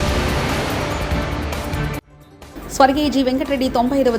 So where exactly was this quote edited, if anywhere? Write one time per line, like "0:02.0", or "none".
none